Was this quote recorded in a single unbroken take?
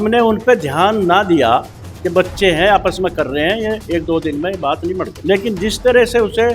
no; 1 cut; at 5.1 s

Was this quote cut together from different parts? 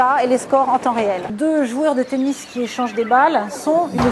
no; 0 cuts

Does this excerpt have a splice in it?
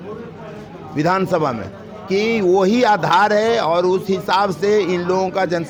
no; 0 cuts

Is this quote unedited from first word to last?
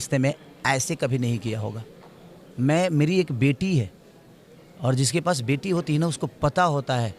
yes; 0 cuts

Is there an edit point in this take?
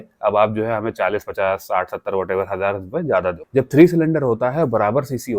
yes; 1 cut; at 3.4 s

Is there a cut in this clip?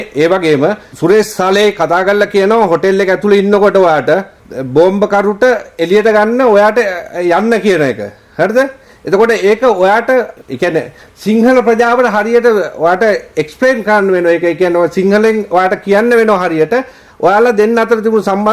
yes; 1 cut; at 10.3 s

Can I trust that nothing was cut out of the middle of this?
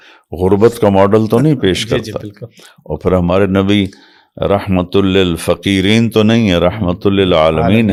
yes; 0 cuts

